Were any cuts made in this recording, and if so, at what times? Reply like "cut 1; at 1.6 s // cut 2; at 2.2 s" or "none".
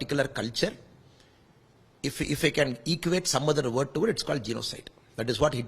none